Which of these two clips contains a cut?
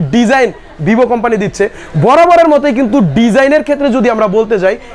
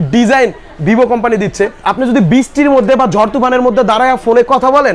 second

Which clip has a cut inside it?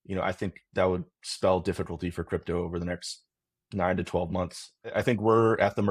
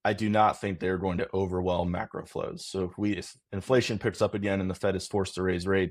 first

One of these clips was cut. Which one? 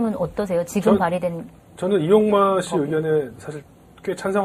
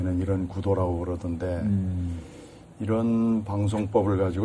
first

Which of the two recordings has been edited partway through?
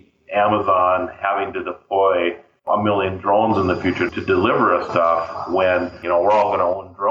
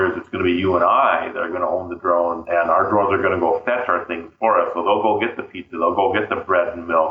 first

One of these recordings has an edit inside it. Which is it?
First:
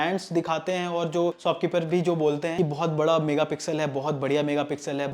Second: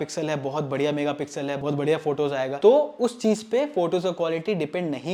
first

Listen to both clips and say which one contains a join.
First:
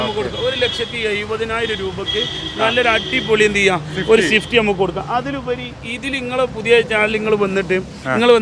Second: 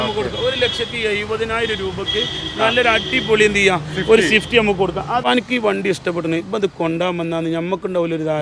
second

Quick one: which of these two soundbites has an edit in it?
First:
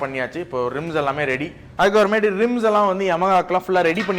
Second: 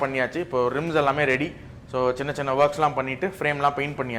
first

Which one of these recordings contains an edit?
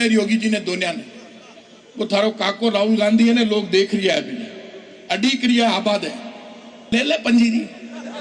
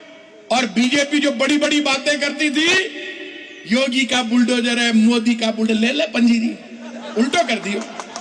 first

